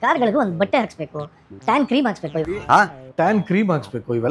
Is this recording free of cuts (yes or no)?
yes